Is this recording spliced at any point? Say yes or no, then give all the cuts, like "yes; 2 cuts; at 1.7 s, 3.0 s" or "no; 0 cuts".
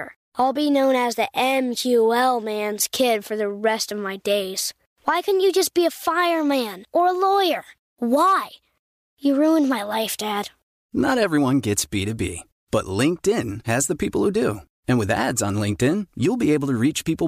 no; 0 cuts